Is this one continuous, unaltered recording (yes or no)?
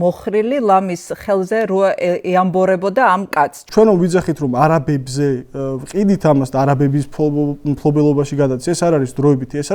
no